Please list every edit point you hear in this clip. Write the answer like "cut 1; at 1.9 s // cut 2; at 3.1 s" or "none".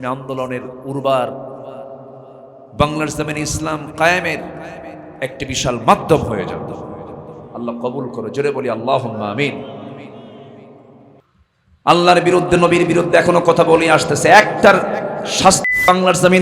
cut 1; at 11.2 s